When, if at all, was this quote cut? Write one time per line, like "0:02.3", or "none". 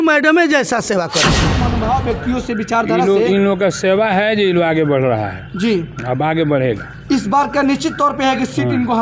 0:01.6